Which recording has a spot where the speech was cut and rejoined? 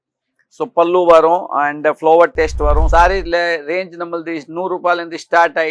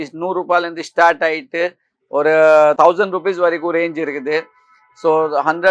first; 1 cut; at 2.8 s

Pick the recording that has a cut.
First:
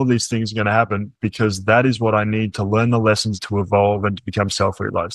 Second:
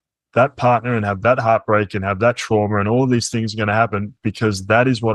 first; 1 cut; at 3.3 s

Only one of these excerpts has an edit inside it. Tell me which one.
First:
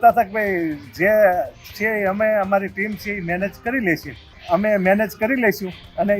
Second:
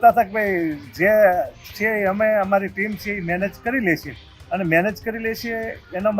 first; 1 cut; at 4.3 s

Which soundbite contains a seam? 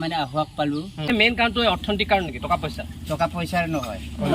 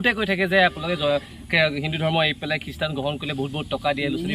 first; 1 cut; at 1.1 s

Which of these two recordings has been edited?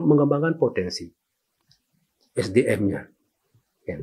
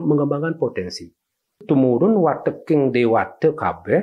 second; 1 cut; at 1.6 s

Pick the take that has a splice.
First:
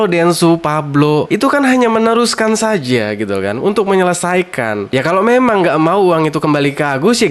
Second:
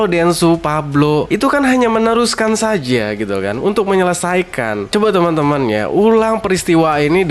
second; 1 cut; at 4.9 s

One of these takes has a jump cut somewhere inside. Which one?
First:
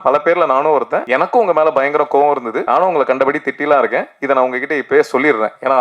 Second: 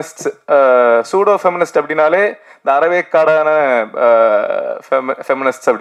first; 2 cuts; at 1.0 s, 2.5 s

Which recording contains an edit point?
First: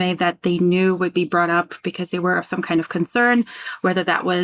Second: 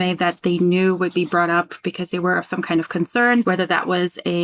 second; 1 cut; at 3.4 s

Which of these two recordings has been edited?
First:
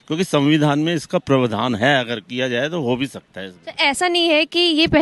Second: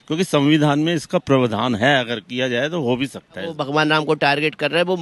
second; 1 cut; at 3.6 s

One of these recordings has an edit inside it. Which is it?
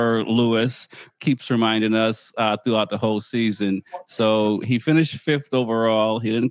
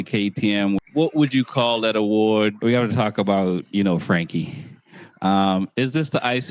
second; 2 cuts; at 0.8 s, 2.6 s

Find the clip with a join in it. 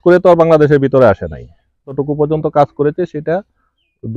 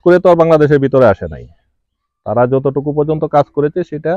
first; 1 cut; at 2.0 s

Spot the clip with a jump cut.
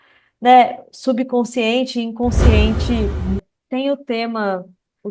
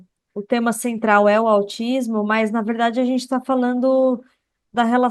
first; 1 cut; at 3.4 s

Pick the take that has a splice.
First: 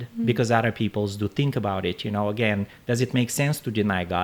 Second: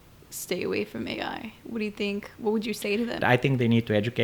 second; 1 cut; at 3.2 s

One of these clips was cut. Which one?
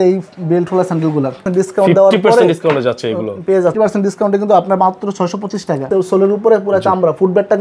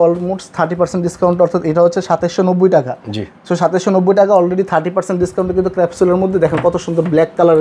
first; 3 cuts; at 1.4 s, 3.7 s, 5.8 s

